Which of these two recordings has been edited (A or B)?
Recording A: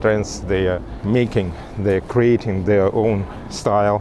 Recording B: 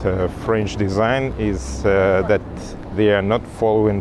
A